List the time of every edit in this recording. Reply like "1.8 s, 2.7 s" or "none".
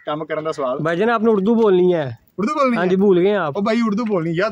3.5 s